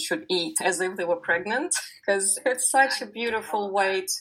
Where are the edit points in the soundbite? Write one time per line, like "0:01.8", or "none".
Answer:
0:01.9